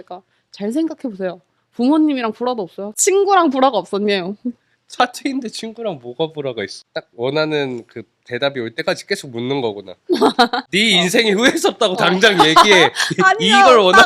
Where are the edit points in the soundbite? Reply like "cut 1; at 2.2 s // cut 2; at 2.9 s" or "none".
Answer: cut 1; at 3.0 s // cut 2; at 6.8 s // cut 3; at 10.6 s